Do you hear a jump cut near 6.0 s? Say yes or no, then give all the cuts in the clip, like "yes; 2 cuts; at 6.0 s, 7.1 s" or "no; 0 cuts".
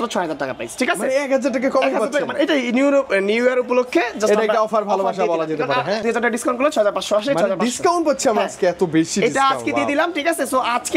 yes; 1 cut; at 6.0 s